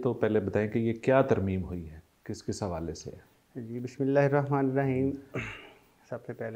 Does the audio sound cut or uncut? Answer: uncut